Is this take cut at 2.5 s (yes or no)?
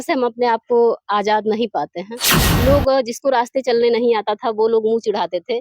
yes